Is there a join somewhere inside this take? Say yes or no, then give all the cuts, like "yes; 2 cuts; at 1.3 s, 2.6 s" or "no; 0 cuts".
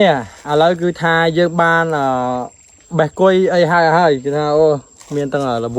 no; 0 cuts